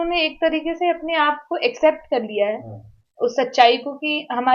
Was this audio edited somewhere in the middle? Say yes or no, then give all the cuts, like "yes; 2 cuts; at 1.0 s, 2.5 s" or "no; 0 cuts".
no; 0 cuts